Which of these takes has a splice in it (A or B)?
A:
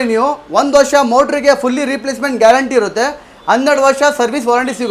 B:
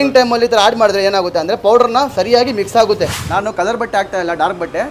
B